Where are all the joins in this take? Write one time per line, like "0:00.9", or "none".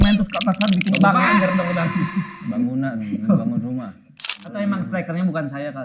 0:04.3

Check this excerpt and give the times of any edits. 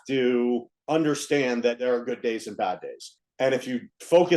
0:01.8
0:03.2

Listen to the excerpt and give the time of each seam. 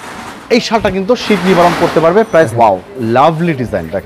0:02.5

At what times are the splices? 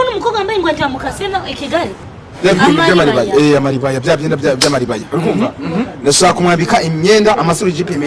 0:02.0

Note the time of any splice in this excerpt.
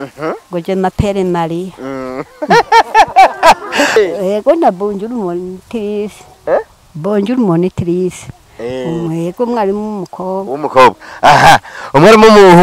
0:04.0

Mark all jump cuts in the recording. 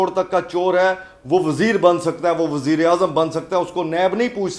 none

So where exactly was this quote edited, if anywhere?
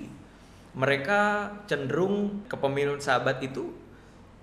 0:02.5

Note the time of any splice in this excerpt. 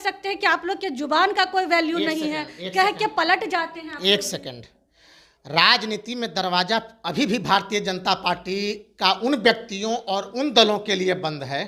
none

